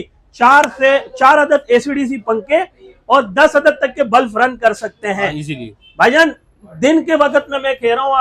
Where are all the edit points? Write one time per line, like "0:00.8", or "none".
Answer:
none